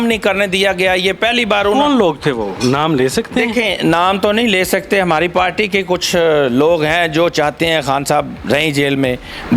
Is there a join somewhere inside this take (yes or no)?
no